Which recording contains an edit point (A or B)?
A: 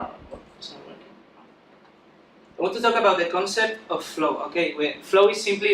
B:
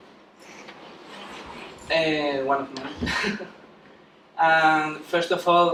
A